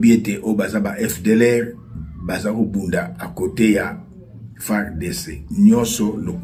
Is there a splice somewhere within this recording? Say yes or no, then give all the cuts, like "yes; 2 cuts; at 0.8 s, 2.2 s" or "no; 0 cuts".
no; 0 cuts